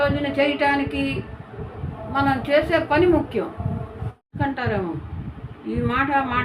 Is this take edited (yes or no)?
yes